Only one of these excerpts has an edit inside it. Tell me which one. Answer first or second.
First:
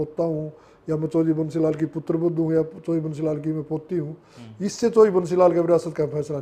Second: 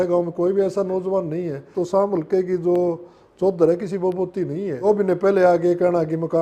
second